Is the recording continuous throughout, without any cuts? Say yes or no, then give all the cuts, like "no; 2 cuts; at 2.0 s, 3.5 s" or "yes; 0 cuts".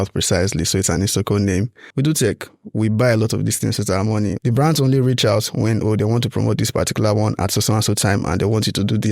no; 2 cuts; at 1.8 s, 4.4 s